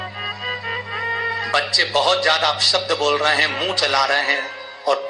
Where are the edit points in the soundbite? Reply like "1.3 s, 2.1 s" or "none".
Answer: none